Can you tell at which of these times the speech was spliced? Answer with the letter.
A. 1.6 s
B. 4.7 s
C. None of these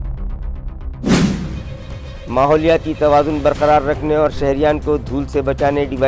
A